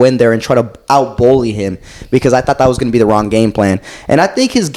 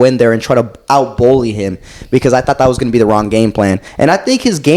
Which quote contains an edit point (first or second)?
second